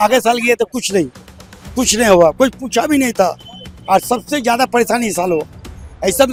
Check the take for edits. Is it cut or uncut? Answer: uncut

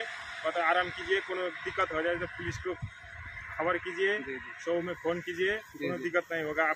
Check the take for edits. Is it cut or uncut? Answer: uncut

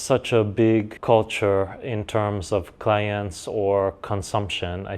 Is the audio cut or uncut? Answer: cut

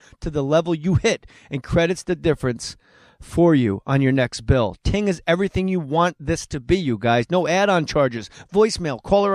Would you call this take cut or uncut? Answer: cut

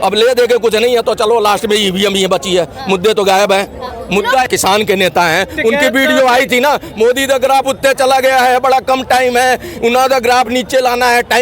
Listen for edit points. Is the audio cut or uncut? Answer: cut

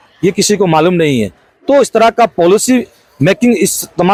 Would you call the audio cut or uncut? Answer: uncut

